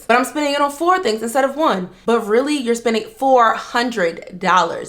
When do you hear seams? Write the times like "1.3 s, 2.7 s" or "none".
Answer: none